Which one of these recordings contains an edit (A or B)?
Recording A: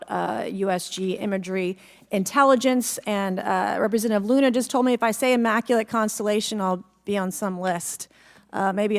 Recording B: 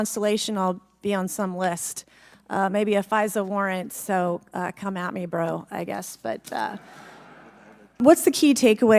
B